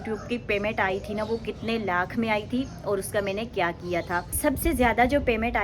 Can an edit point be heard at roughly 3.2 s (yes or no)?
no